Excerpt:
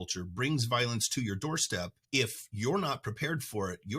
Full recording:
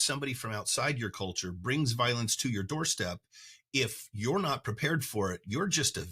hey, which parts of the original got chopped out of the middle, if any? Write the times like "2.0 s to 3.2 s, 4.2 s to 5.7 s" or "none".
3.2 s to 3.6 s